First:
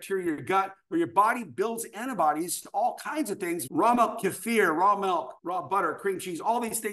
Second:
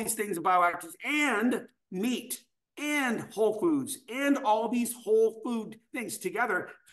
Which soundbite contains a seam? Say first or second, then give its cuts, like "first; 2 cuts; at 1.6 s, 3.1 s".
first; 2 cuts; at 3.6 s, 5.4 s